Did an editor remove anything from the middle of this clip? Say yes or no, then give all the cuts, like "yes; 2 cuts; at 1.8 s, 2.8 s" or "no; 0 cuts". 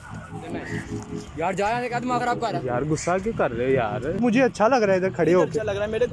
yes; 1 cut; at 4.2 s